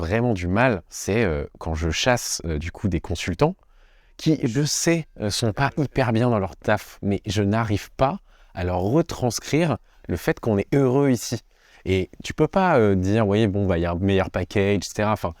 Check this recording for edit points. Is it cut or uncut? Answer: cut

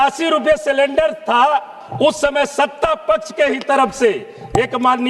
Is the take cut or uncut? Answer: cut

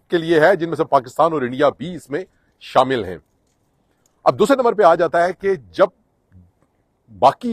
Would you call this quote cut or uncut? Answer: uncut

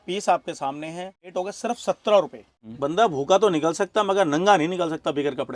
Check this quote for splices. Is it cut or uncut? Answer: cut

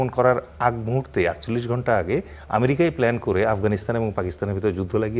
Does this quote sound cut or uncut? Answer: uncut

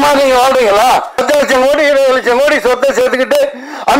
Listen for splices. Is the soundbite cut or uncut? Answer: cut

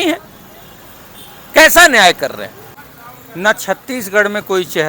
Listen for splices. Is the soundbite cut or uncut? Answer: cut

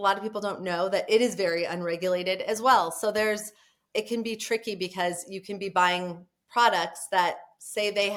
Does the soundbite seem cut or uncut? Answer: uncut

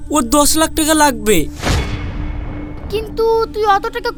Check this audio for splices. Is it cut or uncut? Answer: uncut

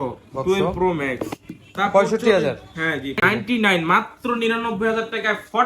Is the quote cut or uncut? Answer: cut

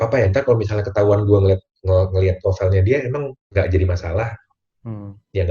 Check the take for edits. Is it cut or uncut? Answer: cut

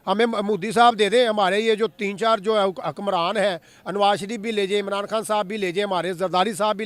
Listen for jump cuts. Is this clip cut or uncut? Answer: uncut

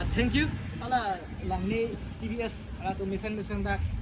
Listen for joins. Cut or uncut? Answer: uncut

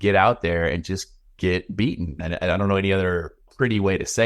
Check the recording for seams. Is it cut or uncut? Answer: uncut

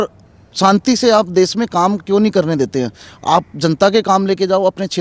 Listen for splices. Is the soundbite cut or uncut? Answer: uncut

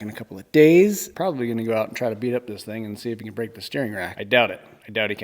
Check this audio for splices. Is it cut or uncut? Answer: cut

